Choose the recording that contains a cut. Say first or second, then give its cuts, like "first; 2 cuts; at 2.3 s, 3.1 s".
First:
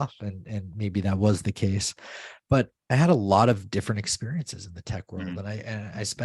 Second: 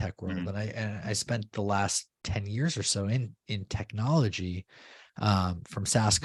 first; 1 cut; at 2.8 s